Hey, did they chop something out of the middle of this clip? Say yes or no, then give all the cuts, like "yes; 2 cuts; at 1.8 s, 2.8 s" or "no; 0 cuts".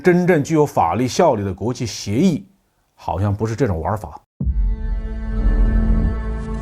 yes; 1 cut; at 4.2 s